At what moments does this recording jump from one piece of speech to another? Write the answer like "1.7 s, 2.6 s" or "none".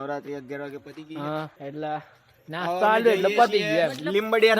1.5 s

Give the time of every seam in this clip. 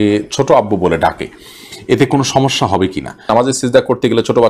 3.3 s

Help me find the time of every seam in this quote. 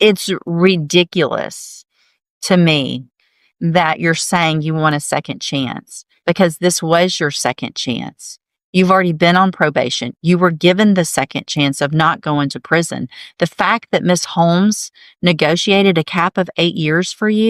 none

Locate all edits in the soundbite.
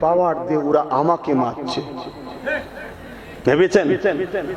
none

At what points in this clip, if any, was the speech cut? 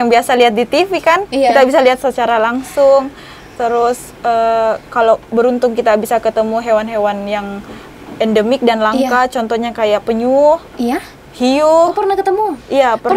none

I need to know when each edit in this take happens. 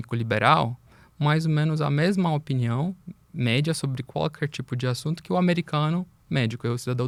none

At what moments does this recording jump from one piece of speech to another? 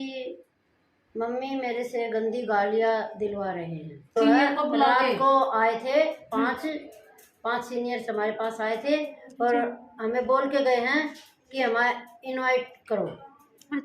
4.2 s

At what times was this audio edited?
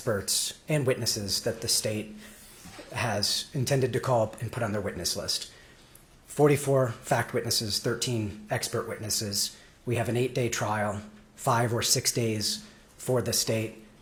none

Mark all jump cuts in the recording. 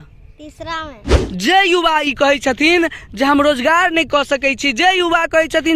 1.2 s

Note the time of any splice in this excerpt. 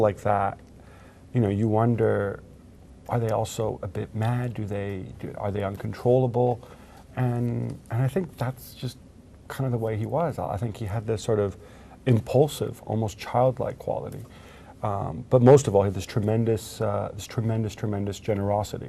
none

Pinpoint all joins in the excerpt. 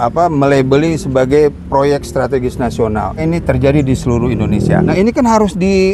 3.2 s, 4.9 s

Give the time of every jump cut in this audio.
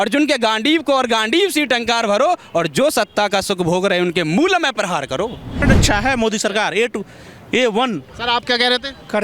5.6 s

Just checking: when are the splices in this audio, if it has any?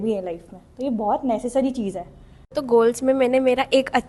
2.6 s

